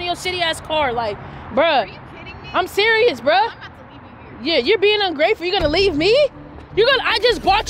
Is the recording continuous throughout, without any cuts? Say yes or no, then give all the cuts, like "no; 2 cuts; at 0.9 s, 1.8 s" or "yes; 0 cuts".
yes; 0 cuts